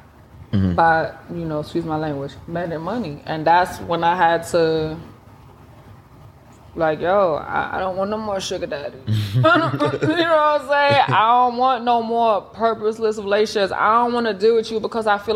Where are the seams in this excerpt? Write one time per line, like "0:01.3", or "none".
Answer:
none